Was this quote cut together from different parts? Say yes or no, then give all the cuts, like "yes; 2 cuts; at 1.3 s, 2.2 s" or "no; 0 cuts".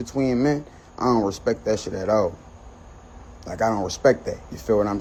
no; 0 cuts